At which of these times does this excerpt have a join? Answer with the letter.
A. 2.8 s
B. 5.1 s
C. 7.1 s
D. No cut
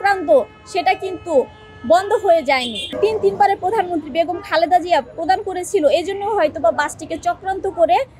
A